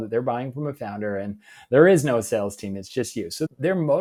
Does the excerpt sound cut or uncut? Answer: uncut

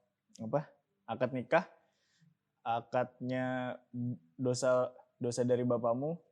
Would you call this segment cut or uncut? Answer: uncut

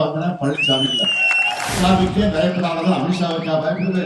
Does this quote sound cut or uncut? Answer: cut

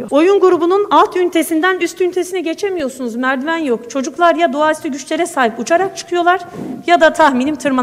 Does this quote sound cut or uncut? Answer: uncut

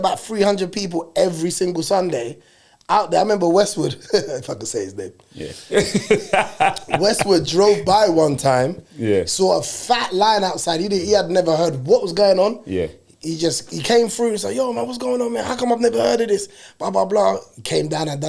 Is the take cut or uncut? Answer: uncut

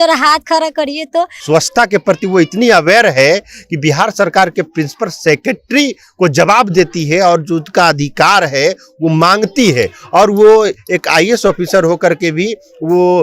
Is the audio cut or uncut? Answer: cut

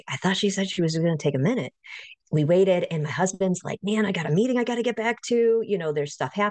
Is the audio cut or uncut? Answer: cut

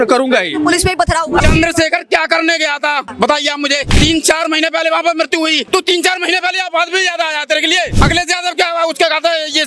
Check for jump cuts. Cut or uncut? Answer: cut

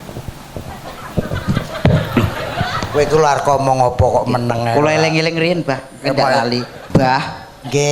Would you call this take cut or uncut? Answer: cut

